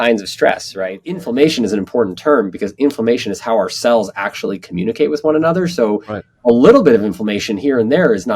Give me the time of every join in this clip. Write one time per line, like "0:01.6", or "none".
0:01.2

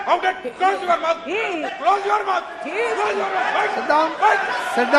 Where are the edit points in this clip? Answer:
none

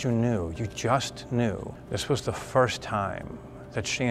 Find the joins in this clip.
0:01.8

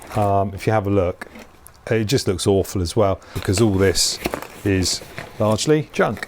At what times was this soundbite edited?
0:03.4

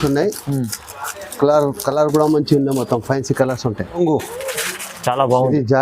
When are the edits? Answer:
0:04.0

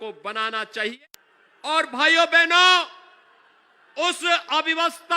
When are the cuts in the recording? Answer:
0:00.9

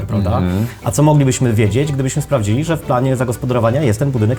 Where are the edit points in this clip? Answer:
none

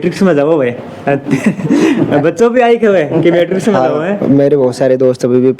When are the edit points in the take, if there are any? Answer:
none

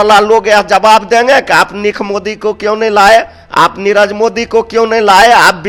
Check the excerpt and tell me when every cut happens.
none

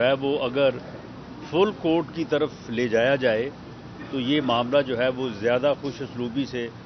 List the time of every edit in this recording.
none

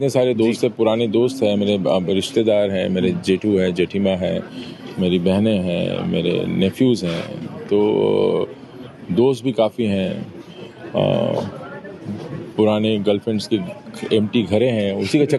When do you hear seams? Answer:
none

